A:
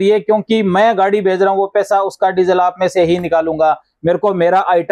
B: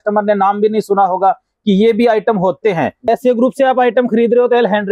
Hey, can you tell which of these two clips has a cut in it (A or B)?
B